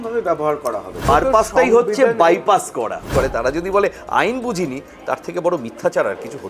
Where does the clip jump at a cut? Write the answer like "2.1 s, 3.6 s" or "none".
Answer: 1.1 s, 3.1 s